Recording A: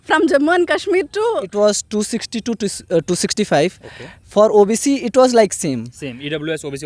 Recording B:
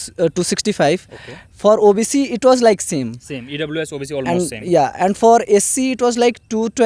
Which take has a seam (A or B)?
A